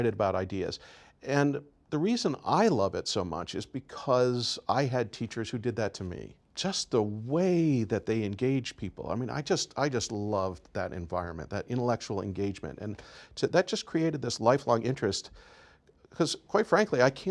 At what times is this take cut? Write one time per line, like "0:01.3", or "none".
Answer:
0:06.4